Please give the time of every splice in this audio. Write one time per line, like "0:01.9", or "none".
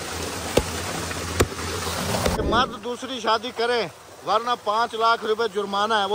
0:02.4